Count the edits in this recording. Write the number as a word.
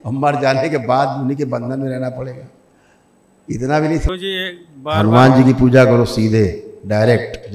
one